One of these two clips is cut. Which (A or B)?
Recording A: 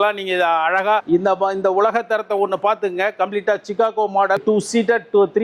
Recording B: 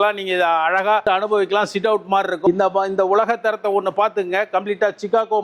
A